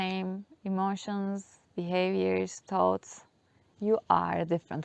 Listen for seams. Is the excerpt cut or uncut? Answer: uncut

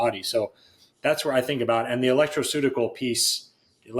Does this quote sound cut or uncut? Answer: uncut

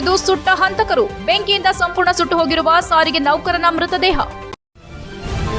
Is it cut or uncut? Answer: cut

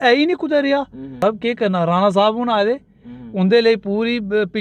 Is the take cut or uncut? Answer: cut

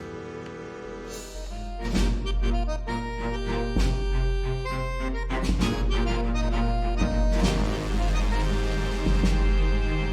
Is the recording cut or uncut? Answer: cut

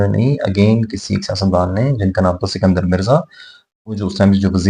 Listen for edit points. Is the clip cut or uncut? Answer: uncut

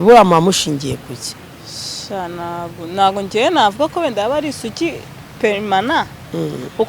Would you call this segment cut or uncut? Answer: uncut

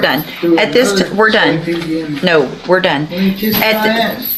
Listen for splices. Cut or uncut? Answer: uncut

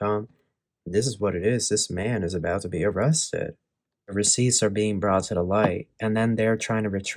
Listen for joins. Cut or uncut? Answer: cut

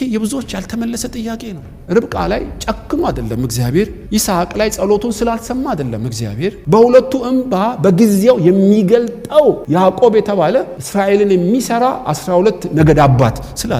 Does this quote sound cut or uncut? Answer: cut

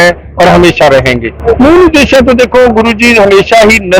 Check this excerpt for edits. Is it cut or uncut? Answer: cut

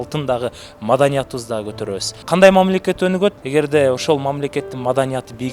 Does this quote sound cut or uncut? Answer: cut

